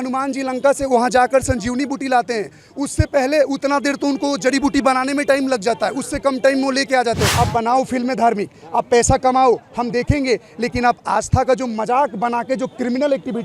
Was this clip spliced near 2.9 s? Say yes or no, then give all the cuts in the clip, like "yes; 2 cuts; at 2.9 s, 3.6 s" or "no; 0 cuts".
no; 1 cut; at 7.3 s